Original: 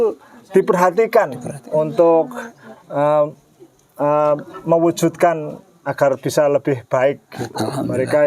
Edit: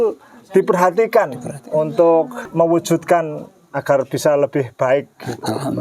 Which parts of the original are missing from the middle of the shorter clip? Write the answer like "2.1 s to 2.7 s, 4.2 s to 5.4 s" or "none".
2.4 s to 4.5 s

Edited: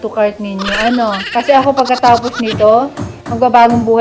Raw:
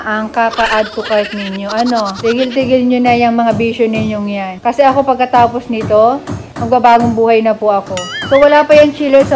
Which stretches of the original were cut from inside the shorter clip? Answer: 2.1 s to 4.5 s

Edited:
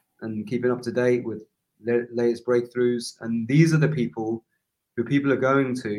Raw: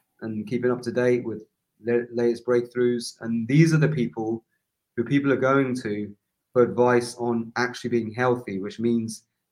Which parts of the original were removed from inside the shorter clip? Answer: none

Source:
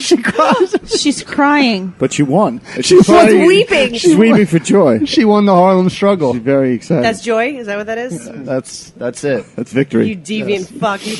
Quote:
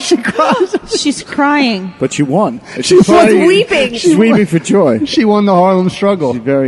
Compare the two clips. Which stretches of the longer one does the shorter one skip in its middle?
none

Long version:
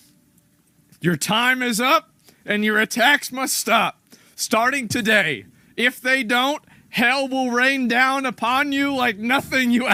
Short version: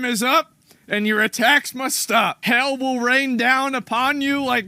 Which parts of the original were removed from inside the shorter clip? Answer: 3.9 s to 6.9 s

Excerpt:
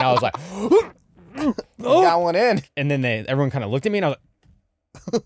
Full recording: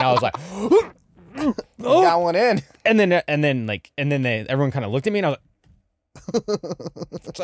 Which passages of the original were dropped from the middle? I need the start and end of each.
2.7 s to 3.9 s

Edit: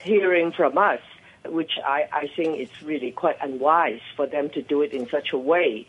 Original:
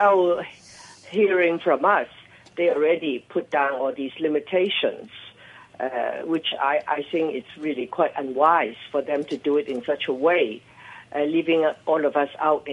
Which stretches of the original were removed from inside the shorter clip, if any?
2.5 s to 6.2 s

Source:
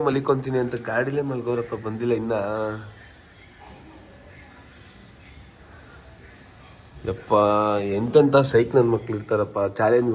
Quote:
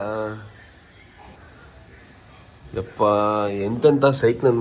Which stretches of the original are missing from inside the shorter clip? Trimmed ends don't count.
3.8 s to 5.7 s

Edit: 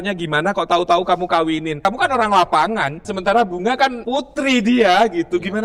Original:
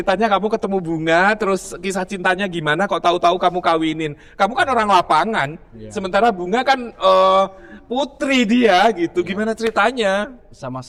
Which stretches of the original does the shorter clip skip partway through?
4.1 s to 4.3 s, 5.6 s to 5.9 s, 6.9 s to 7.8 s

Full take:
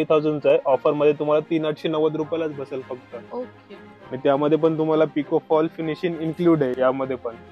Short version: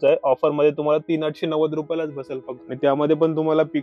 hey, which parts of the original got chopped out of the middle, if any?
3.0 s to 4.0 s

